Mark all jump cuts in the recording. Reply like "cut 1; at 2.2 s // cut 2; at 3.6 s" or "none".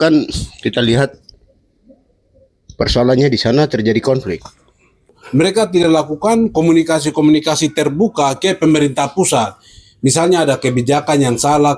cut 1; at 5.2 s